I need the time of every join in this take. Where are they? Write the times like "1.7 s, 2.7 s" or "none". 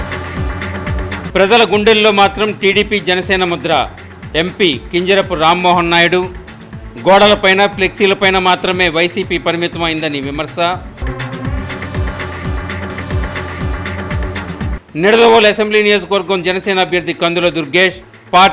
1.2 s